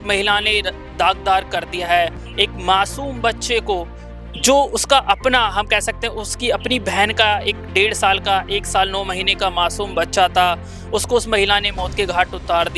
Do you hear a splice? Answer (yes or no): no